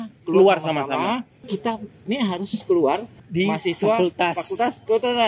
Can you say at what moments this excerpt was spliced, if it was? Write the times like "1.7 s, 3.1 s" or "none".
1.4 s, 3.2 s